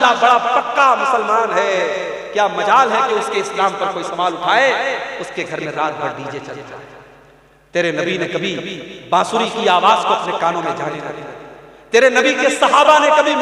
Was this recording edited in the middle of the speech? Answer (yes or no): no